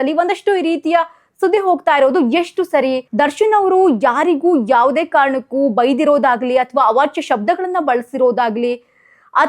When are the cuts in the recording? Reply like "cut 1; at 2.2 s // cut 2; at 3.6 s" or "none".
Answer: cut 1; at 3.0 s